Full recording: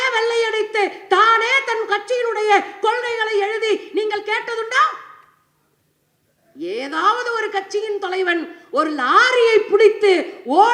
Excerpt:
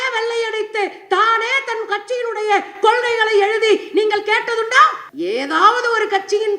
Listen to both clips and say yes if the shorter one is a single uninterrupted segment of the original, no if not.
no